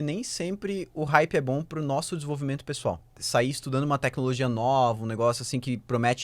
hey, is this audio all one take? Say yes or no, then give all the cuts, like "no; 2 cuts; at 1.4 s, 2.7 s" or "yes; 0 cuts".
no; 1 cut; at 3.2 s